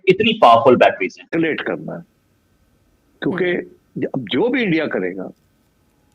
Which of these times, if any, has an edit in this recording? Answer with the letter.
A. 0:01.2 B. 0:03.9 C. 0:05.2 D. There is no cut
A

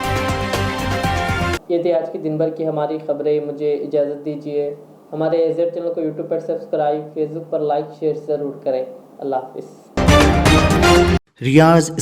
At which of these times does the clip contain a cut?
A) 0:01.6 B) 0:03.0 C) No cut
C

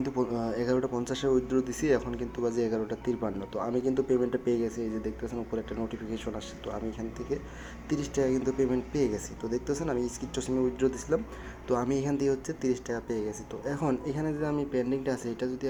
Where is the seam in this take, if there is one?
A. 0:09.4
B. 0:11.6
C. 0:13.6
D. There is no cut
D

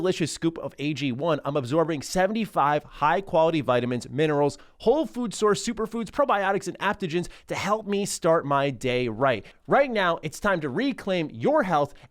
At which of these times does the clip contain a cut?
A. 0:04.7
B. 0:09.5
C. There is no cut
B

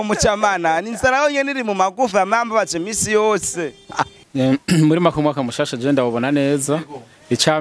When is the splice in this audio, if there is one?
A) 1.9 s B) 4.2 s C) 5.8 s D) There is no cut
B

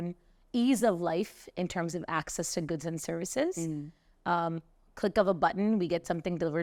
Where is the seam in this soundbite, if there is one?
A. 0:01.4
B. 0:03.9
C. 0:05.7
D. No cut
D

